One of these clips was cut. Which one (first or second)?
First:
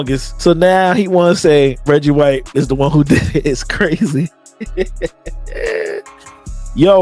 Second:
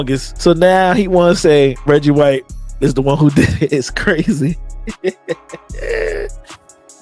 first